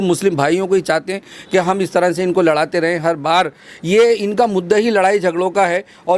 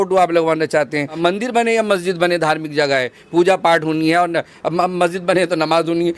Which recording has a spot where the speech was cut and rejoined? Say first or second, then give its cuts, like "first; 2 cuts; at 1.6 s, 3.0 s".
second; 1 cut; at 1.2 s